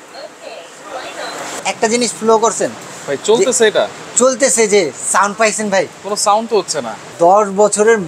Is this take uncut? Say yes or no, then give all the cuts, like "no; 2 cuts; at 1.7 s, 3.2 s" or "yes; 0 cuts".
no; 2 cuts; at 1.6 s, 7.1 s